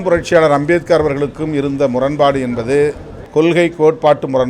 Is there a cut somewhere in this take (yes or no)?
yes